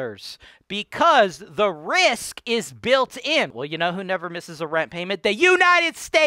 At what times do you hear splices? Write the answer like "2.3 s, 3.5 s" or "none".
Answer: 3.5 s